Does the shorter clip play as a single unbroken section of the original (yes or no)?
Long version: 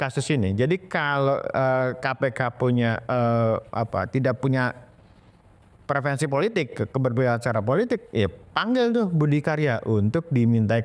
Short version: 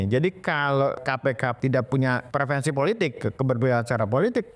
no